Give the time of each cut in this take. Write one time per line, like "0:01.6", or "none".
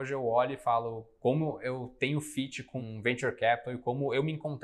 0:02.8